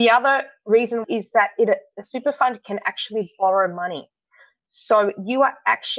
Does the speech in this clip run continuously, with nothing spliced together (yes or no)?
no